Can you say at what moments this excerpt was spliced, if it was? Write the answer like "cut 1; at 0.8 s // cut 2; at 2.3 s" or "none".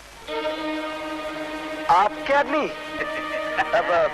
cut 1; at 2.9 s